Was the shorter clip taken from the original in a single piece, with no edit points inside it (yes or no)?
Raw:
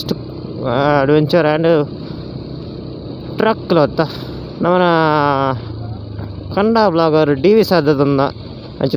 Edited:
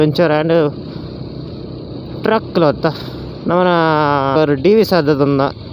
no